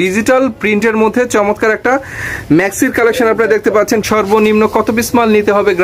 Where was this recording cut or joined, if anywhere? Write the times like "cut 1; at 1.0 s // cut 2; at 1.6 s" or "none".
cut 1; at 4.1 s